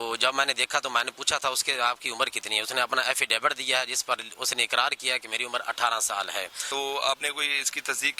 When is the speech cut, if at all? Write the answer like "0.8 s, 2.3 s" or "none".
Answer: 6.6 s